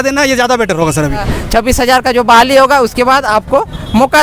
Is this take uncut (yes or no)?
no